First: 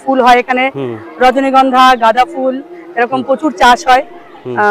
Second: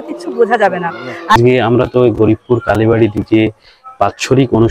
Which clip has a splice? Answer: second; 1 cut; at 1.4 s

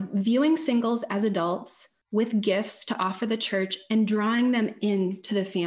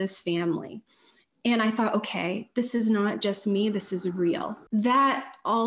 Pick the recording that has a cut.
second; 1 cut; at 4.6 s

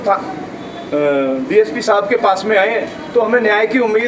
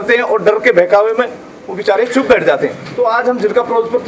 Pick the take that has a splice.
second; 1 cut; at 2.8 s

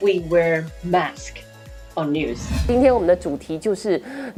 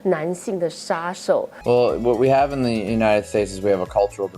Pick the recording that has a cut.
second; 1 cut; at 1.5 s

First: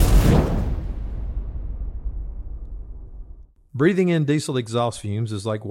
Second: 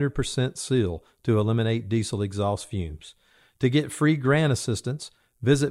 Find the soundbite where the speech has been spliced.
first; 1 cut; at 3.5 s

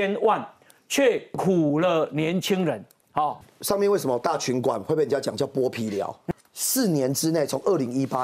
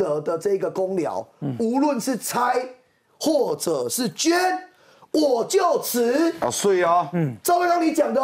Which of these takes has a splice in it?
first; 2 cuts; at 3.5 s, 6.2 s

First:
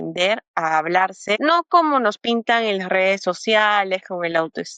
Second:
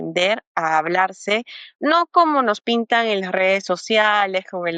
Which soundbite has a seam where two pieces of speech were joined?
first; 1 cut; at 1.4 s

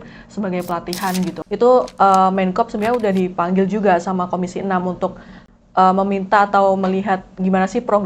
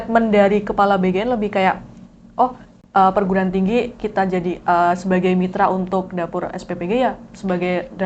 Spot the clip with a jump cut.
first; 1 cut; at 1.4 s

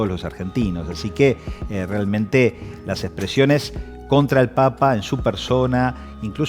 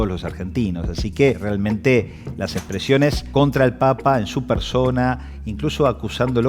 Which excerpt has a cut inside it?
second; 2 cuts; at 1.4 s, 3.2 s

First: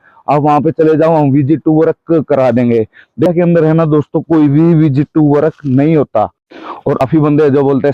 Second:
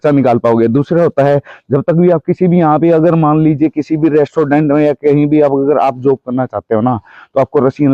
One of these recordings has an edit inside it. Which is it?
first; 2 cuts; at 3.3 s, 7.0 s

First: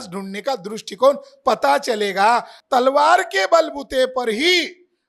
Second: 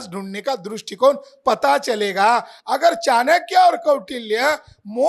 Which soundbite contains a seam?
first; 1 cut; at 2.5 s

